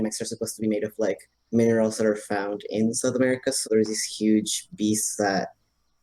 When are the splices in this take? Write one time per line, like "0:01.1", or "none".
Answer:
0:03.7